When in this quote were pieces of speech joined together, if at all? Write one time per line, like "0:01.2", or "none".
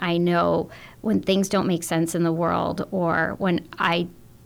none